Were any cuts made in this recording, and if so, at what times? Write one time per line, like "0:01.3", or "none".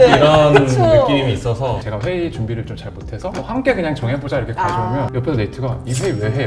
0:01.9
0:03.3
0:05.1